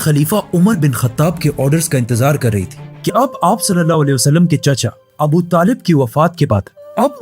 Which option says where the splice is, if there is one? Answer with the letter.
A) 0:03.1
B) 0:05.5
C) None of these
A